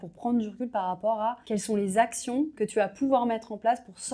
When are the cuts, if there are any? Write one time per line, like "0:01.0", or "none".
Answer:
0:01.4
0:02.5